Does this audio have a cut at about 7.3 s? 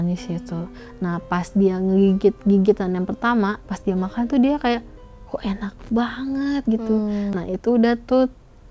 yes; 2 cuts; at 3.7 s, 7.3 s

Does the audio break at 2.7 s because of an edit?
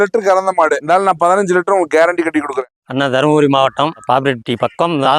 yes; 1 cut; at 2.7 s

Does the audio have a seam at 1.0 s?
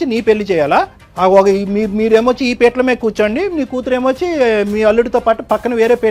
yes; 1 cut; at 1.0 s

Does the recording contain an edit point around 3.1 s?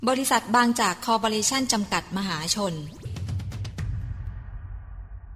yes; 1 cut; at 3.1 s

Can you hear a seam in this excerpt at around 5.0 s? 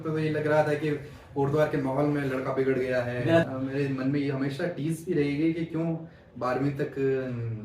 no; 1 cut; at 3.5 s

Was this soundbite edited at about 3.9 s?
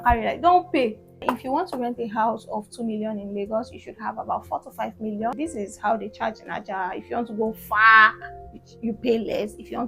no; 2 cuts; at 1.2 s, 5.4 s

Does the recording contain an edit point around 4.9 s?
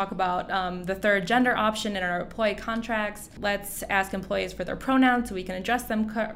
no; 1 cut; at 3.3 s

